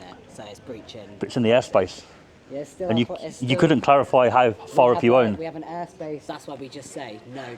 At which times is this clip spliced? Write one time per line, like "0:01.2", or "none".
0:06.2